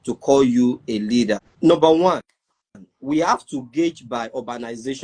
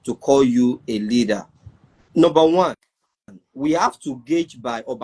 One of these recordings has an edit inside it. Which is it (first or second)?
first